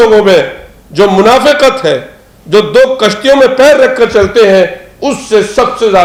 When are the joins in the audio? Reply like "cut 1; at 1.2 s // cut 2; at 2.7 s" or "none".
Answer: none